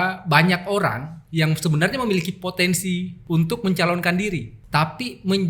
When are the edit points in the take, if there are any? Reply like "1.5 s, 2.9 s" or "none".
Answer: 3.1 s, 4.5 s